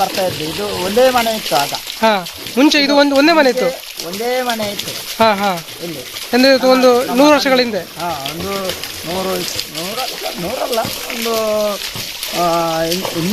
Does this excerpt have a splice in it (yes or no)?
no